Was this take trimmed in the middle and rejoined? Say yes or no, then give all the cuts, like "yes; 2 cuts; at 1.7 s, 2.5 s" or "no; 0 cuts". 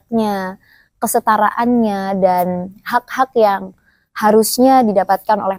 no; 0 cuts